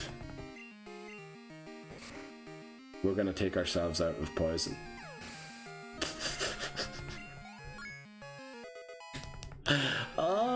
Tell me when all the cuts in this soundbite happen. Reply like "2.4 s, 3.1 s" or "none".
4.7 s